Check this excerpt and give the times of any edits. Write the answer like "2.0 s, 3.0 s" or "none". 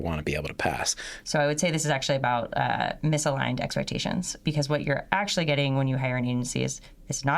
1.1 s, 4.4 s